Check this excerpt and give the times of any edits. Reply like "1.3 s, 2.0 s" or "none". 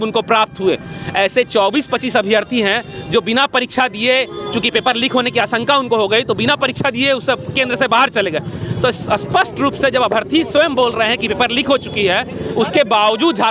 none